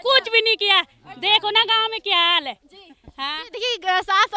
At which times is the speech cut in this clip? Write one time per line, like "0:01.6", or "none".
none